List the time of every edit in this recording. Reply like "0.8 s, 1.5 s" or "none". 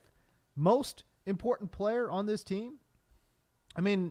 none